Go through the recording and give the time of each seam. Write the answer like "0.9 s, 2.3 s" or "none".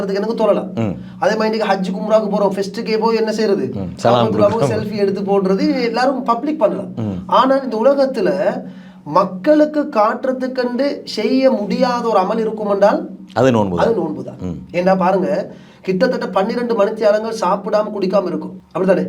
none